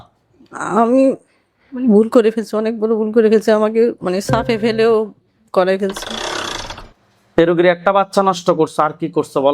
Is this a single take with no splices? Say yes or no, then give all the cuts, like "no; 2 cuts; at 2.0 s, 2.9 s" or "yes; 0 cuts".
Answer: yes; 0 cuts